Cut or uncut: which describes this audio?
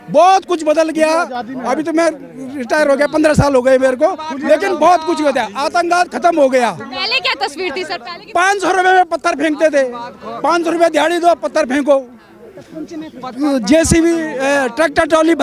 uncut